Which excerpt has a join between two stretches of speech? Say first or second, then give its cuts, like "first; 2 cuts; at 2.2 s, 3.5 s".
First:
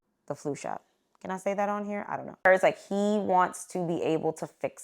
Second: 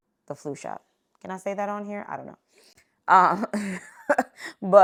first; 1 cut; at 2.4 s